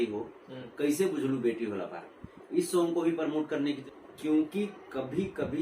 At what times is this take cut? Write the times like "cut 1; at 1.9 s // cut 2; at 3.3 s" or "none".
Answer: cut 1; at 3.8 s